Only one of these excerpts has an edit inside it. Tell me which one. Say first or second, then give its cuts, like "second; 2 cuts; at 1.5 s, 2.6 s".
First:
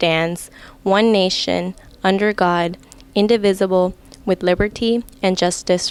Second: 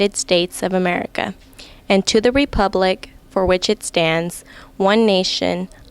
second; 1 cut; at 2.5 s